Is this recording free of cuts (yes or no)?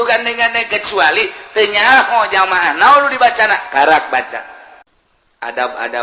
no